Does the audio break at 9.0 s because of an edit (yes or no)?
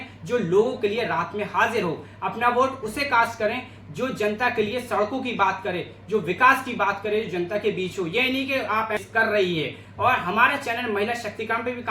yes